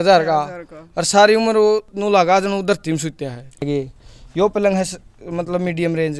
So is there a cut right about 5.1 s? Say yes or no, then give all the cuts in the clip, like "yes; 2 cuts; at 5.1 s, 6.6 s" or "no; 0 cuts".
no; 2 cuts; at 1.9 s, 3.7 s